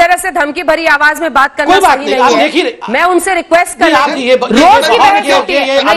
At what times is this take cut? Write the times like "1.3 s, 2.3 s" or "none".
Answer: 4.1 s